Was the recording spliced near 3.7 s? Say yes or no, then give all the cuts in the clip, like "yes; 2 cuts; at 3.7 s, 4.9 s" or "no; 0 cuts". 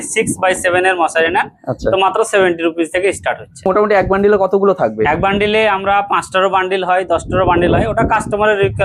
yes; 1 cut; at 3.7 s